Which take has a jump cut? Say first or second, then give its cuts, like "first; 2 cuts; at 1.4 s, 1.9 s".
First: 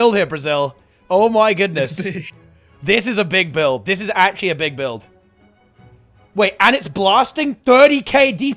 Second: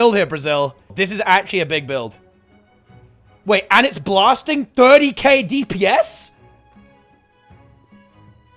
second; 1 cut; at 1.0 s